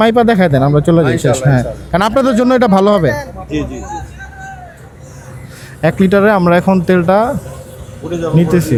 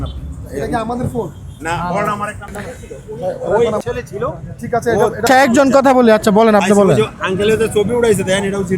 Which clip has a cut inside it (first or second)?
second